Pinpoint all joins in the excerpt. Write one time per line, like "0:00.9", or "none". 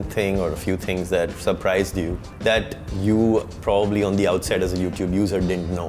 none